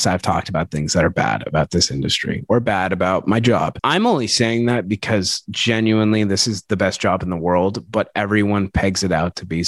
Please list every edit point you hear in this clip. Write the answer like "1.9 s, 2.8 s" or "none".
3.8 s

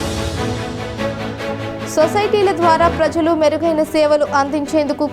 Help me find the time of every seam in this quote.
1.5 s

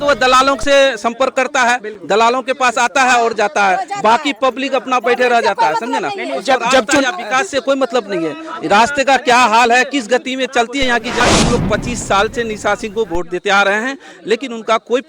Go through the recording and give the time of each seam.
11.2 s

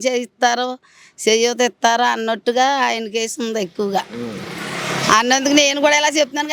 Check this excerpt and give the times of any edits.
none

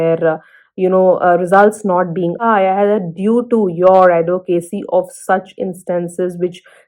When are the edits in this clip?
2.4 s

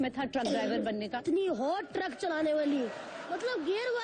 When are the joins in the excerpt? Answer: 1.2 s, 3.2 s

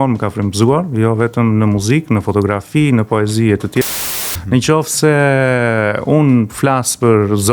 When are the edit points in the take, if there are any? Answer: 4.0 s

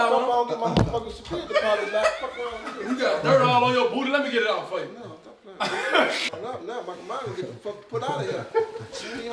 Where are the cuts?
6.3 s

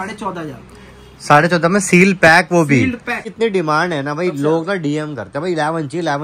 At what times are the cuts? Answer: 3.3 s

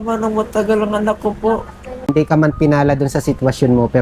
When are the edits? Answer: 2.1 s

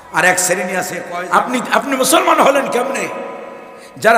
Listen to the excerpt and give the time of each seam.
1.0 s

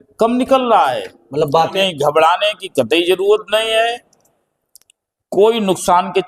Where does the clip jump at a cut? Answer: 1.7 s

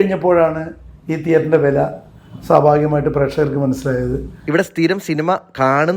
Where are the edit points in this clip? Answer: 4.3 s

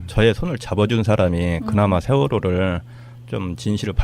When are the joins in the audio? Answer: 1.6 s

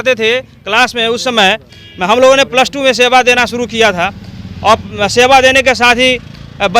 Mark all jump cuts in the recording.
none

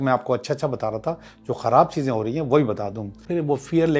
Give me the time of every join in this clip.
3.1 s

